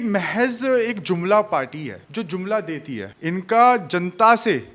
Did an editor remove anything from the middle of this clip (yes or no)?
yes